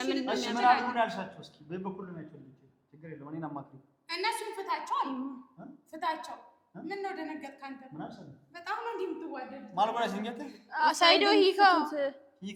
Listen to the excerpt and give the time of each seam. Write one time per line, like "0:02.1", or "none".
none